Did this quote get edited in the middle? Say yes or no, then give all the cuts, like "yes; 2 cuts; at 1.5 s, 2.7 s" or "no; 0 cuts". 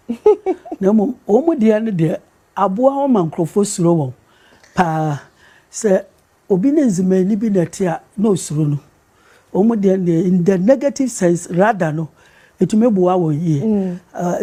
no; 0 cuts